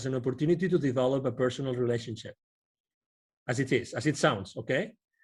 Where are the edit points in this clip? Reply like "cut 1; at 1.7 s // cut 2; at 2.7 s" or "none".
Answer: none

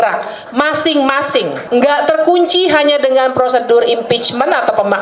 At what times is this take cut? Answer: cut 1; at 1.6 s

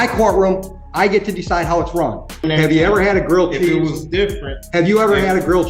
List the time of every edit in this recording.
cut 1; at 2.2 s

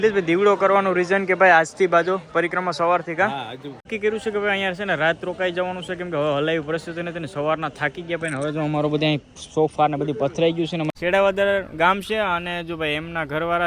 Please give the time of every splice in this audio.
cut 1; at 3.7 s // cut 2; at 10.9 s

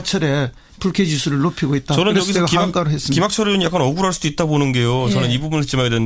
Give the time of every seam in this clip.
none

